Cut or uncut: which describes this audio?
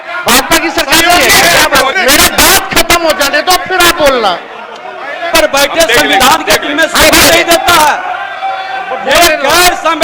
cut